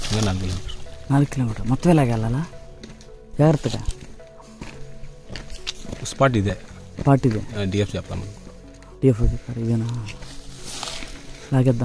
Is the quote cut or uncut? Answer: uncut